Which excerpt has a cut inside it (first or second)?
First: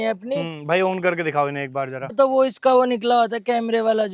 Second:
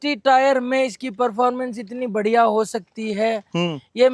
first